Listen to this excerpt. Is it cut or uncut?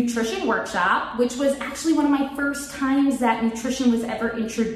uncut